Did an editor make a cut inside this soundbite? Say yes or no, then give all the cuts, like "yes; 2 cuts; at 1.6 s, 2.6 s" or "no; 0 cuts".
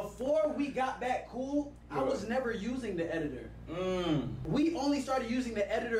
yes; 1 cut; at 4.4 s